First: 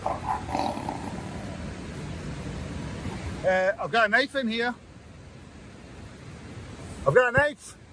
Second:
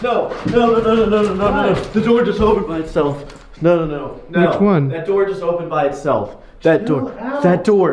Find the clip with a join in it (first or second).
first